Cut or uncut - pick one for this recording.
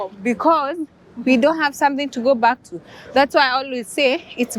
uncut